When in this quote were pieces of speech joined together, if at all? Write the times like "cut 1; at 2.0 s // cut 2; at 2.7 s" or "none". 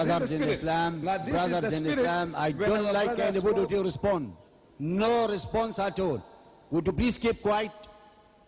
none